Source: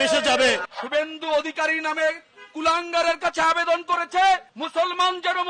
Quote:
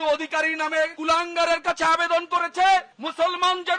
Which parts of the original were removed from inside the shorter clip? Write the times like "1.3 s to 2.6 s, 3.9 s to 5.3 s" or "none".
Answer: 2.2 s to 2.5 s